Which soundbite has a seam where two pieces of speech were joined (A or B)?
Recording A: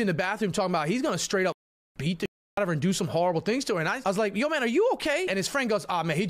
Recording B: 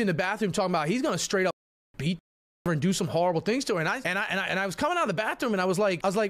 A